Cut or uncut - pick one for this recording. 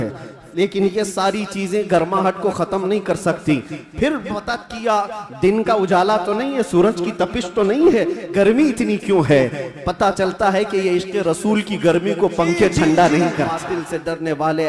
cut